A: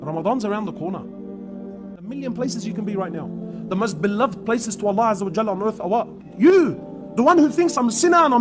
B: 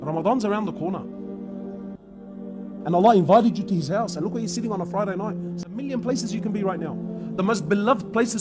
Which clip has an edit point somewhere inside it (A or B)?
A